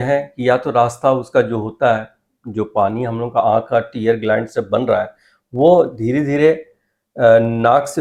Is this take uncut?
yes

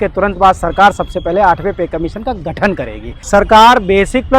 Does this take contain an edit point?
yes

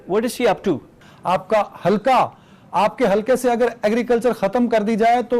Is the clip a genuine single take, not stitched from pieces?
no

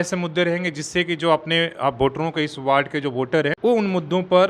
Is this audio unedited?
yes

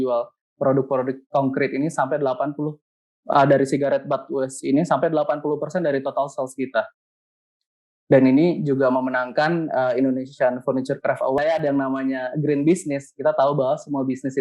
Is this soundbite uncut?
no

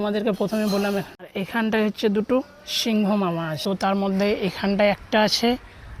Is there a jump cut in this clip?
yes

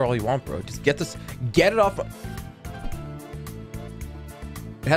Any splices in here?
no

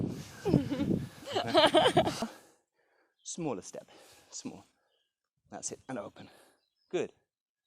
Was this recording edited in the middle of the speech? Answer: yes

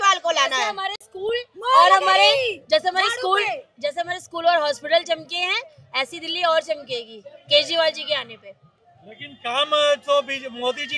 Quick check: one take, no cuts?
yes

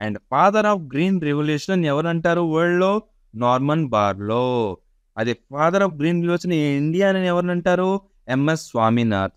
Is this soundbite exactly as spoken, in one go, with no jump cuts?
yes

